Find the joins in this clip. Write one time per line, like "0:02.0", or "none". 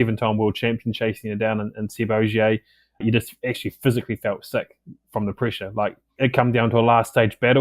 0:06.2